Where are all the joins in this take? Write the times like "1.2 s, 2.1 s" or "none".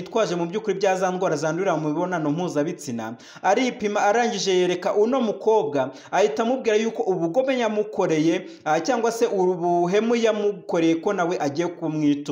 none